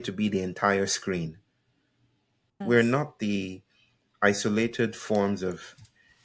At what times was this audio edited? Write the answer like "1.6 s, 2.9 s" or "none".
2.6 s